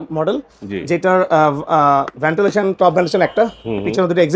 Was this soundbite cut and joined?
no; 0 cuts

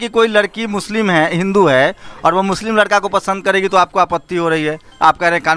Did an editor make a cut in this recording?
no; 0 cuts

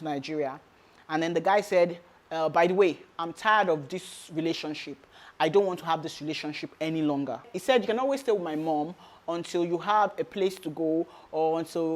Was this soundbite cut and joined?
yes; 1 cut; at 7.5 s

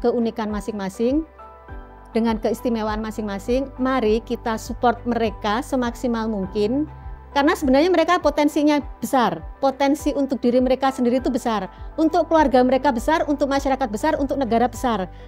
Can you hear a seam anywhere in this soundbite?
no; 0 cuts

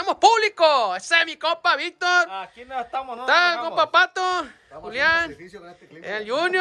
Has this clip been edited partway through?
no; 0 cuts

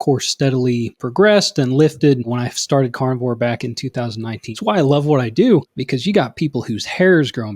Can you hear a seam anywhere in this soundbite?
yes; 4 cuts; at 1.0 s, 2.2 s, 4.5 s, 5.8 s

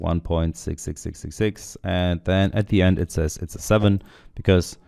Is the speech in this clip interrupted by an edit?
no; 0 cuts

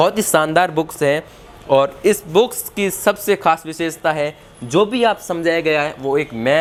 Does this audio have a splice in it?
no; 0 cuts

